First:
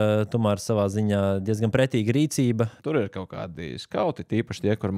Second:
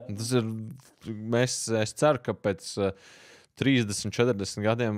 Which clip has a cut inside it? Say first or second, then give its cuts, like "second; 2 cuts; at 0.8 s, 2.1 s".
first; 1 cut; at 2.8 s